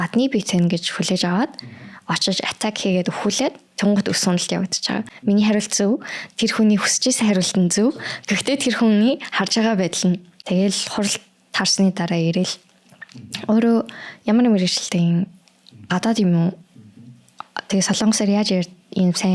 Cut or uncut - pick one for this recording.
cut